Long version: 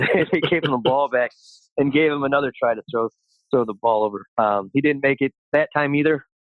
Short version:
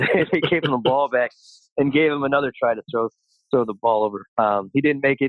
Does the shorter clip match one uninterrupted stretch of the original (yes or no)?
yes